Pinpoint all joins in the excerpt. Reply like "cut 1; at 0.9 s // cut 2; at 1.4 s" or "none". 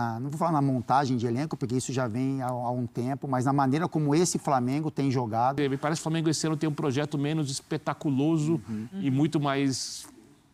cut 1; at 5.6 s